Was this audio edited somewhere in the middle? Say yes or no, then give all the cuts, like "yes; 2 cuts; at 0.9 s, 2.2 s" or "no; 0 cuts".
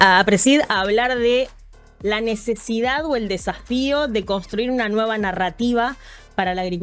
no; 0 cuts